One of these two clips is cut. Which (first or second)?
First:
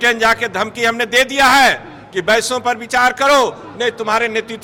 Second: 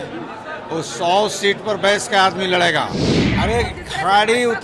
second